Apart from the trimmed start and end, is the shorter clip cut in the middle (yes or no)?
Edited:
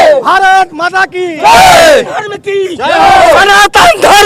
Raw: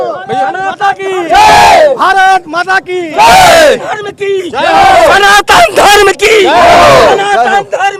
no